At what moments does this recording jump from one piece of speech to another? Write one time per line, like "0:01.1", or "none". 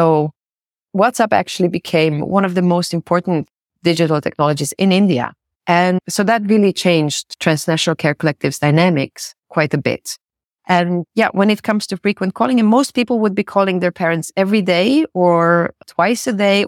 0:03.5
0:06.0
0:07.3